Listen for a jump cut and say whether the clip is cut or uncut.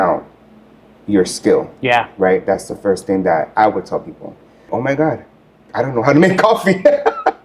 cut